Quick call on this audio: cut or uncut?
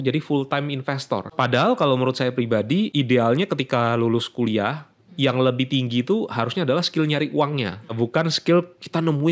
cut